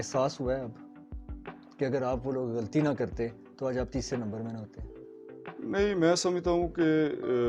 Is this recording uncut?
yes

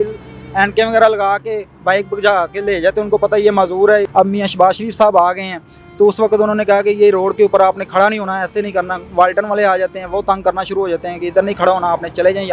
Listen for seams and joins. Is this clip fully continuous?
no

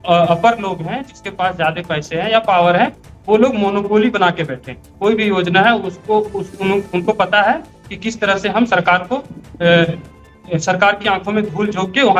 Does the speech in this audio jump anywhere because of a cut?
no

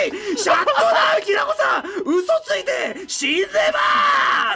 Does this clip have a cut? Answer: no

